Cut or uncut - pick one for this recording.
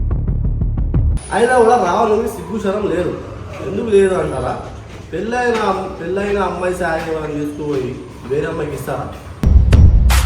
cut